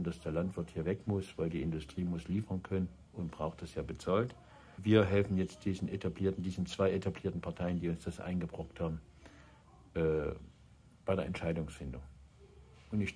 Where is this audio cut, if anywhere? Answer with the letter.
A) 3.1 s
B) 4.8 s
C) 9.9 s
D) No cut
B